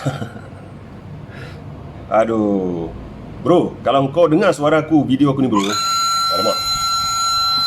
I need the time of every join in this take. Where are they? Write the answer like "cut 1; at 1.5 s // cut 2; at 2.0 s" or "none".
none